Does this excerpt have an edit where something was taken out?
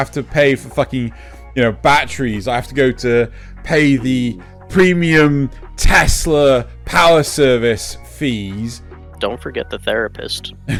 no; 0 cuts

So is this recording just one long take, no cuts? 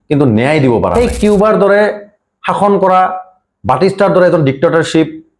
no; 1 cut; at 0.9 s

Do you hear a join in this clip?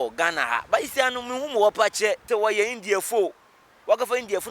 yes; 1 cut; at 2.2 s

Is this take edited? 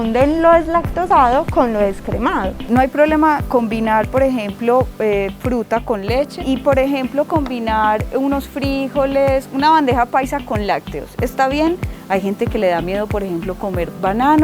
yes; 3 cuts; at 2.6 s, 6.4 s, 11.9 s

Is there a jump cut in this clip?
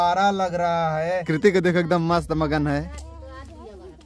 yes; 1 cut; at 1.2 s

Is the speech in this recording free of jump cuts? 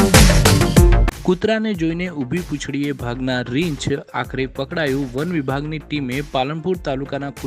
no; 1 cut; at 1.1 s

